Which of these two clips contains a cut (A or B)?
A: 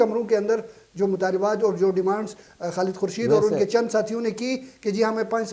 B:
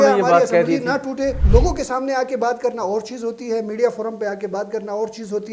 B